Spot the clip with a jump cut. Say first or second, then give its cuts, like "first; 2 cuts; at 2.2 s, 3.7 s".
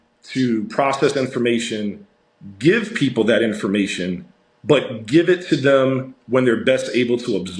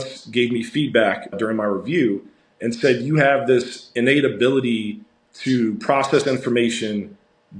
second; 1 cut; at 1.3 s